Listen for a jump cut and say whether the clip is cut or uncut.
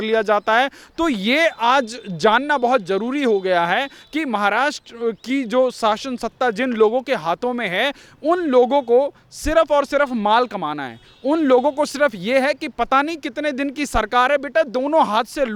uncut